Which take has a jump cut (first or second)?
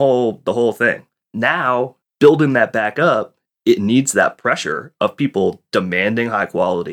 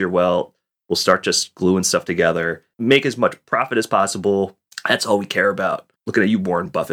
second